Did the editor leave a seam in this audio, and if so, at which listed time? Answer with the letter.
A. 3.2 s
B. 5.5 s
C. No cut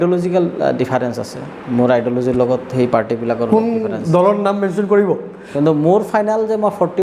B